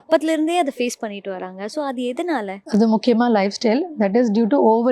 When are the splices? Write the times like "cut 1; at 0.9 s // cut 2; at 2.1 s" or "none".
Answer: cut 1; at 2.6 s